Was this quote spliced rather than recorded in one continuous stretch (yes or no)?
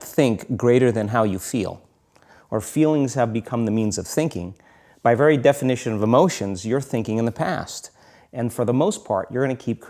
no